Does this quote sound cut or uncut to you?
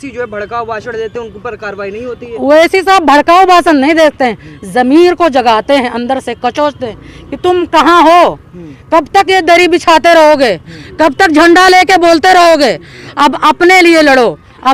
uncut